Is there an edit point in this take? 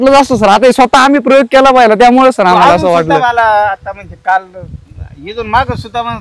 no; 0 cuts

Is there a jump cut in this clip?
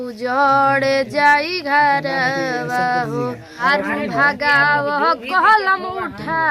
yes; 1 cut; at 3.6 s

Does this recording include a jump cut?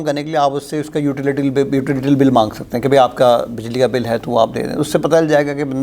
no; 0 cuts

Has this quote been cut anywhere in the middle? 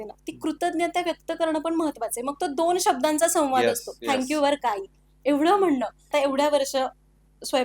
yes; 1 cut; at 6.1 s

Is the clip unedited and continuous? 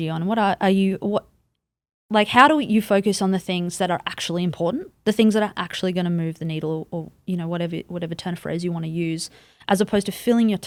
yes; 0 cuts

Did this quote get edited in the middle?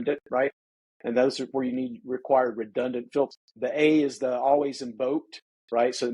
yes; 1 cut; at 3.3 s

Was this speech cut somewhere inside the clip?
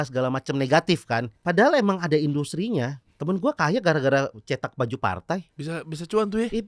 yes; 3 cuts; at 1.3 s, 3.1 s, 5.6 s

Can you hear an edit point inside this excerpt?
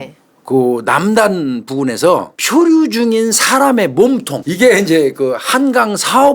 yes; 2 cuts; at 2.3 s, 4.4 s

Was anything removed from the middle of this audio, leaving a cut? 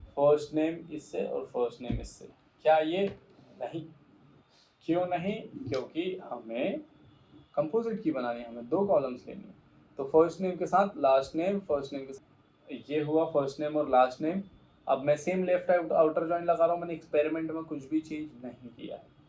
yes; 1 cut; at 12.0 s

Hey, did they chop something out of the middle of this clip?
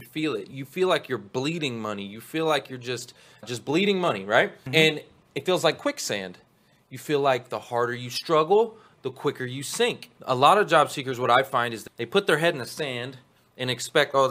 yes; 2 cuts; at 10.1 s, 11.8 s

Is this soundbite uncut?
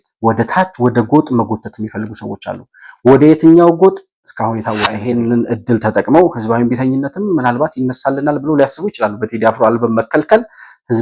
no; 1 cut; at 4.9 s

